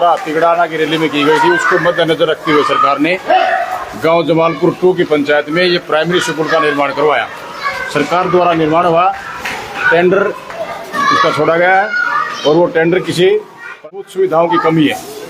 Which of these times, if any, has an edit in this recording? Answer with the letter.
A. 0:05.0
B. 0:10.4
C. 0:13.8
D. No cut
C